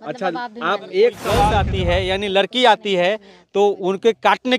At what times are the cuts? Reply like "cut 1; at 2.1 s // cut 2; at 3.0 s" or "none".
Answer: cut 1; at 1.5 s